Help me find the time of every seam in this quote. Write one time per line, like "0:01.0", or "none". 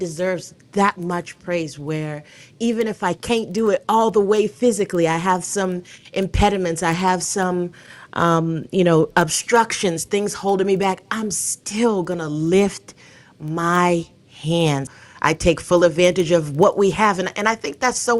0:14.8

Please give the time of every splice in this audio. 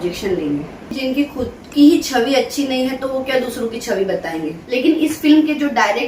0:00.9
0:04.6

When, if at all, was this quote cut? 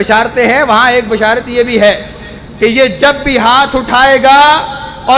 none

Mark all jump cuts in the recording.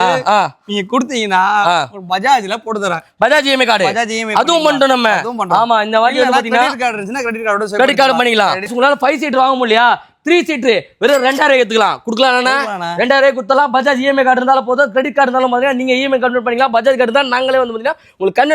0:08.7

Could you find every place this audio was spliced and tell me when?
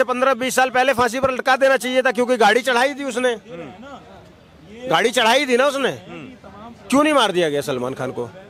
none

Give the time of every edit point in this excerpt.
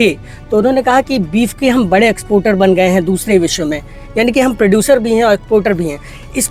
none

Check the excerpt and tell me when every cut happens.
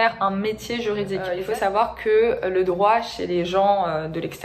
0:01.4

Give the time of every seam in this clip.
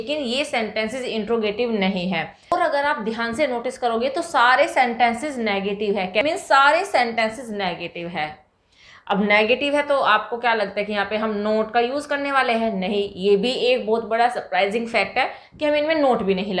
0:02.5
0:06.2

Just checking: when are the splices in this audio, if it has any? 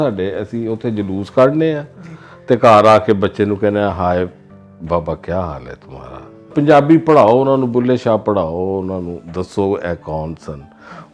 0:06.5
0:09.2

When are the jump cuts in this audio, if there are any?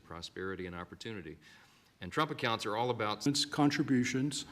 0:03.3

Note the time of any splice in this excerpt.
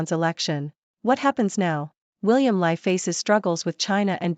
0:02.0

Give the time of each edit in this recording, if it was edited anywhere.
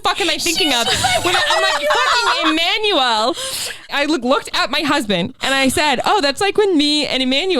0:03.9
0:05.4

